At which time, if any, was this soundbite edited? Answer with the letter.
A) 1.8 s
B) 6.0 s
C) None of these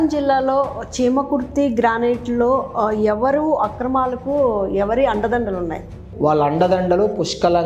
B